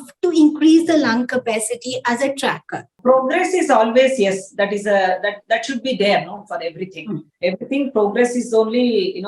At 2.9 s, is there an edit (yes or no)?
yes